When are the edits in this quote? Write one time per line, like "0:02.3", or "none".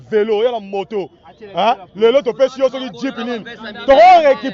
none